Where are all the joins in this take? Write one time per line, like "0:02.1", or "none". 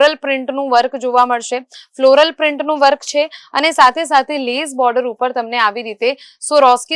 none